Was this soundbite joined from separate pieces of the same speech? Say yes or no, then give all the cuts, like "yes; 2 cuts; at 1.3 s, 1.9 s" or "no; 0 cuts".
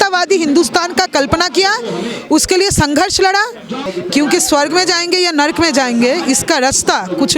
yes; 1 cut; at 3.9 s